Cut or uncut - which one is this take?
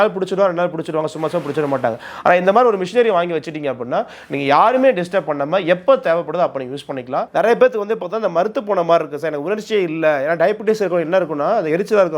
cut